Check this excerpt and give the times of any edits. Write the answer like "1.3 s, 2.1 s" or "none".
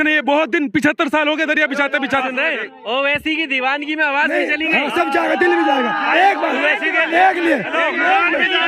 2.2 s